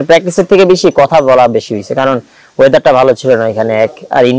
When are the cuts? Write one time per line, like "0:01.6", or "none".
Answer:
none